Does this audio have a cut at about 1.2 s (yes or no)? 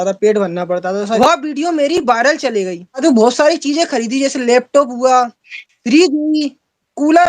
yes